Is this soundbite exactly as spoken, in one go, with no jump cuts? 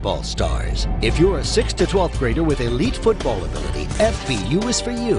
yes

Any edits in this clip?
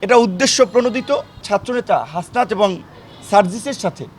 yes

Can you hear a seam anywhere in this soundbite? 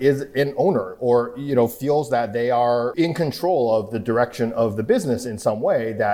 yes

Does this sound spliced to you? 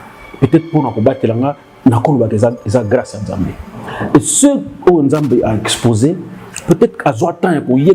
no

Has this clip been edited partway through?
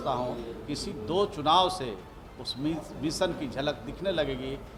no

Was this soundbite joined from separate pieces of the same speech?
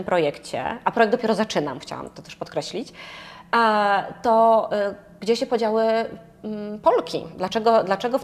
no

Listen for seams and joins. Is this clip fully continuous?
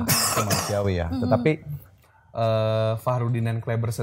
no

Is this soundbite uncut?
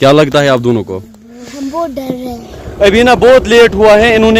no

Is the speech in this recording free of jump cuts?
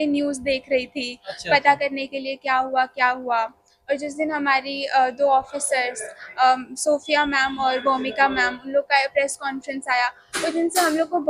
yes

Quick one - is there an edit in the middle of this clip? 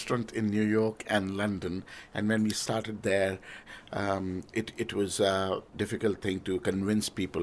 yes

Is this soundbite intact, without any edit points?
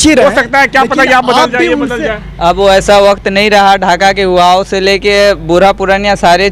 yes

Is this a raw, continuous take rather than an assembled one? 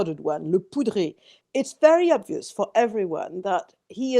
no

